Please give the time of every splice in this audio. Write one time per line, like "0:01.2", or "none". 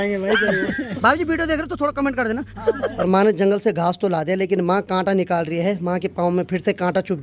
0:00.9
0:03.0